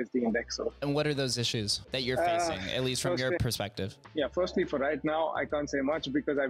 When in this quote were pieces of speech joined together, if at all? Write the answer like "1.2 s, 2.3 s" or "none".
0.8 s, 1.8 s, 3.4 s